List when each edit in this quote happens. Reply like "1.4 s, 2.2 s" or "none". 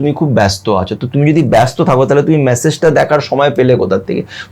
none